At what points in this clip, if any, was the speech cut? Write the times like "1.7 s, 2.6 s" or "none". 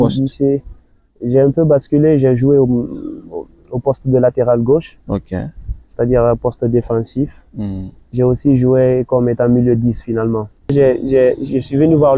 10.7 s